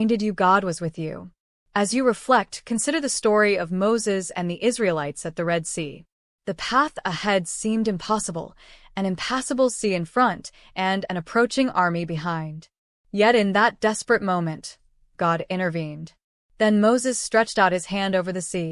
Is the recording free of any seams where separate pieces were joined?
yes; 0 cuts

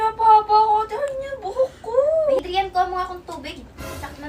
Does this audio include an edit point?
yes; 1 cut; at 2.4 s

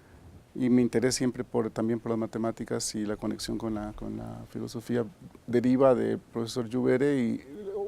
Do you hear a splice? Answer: yes; 1 cut; at 4.5 s

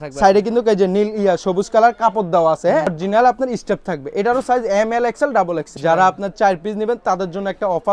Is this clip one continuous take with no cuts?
no; 2 cuts; at 3.0 s, 5.7 s

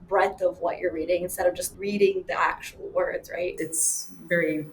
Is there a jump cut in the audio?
yes; 2 cuts; at 1.7 s, 3.5 s

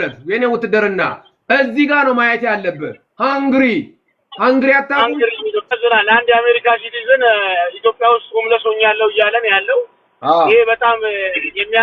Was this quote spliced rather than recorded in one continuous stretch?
yes; 1 cut; at 5.8 s

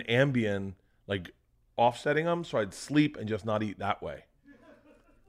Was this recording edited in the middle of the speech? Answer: no; 0 cuts

